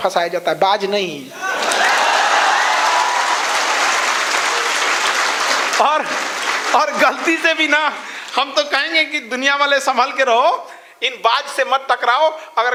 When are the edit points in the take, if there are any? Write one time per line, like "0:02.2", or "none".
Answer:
none